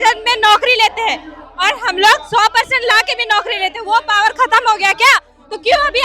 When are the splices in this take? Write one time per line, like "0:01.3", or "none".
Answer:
none